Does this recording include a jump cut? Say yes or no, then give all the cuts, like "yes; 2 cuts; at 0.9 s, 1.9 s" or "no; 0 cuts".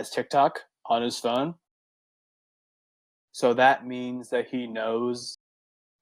no; 0 cuts